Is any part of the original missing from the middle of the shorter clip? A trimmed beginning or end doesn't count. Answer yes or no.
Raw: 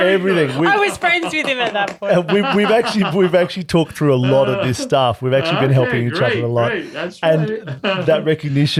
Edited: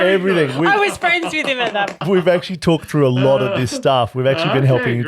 yes